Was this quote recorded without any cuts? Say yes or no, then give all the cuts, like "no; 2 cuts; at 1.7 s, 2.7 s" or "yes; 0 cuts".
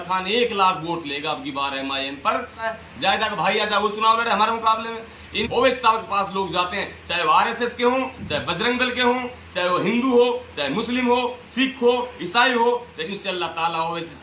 no; 3 cuts; at 2.6 s, 5.4 s, 13.1 s